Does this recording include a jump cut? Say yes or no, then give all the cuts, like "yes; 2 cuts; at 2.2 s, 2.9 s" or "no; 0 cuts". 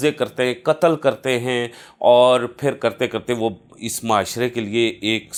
no; 0 cuts